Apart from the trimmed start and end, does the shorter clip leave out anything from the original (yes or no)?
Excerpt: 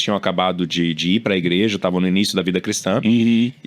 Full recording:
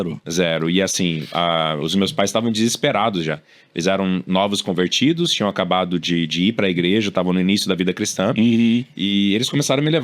no